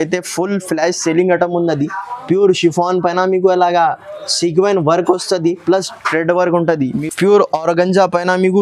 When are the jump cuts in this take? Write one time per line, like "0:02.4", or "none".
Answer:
0:07.0